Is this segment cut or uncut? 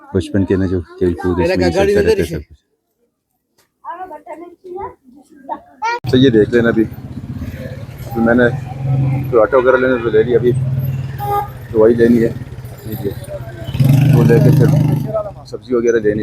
cut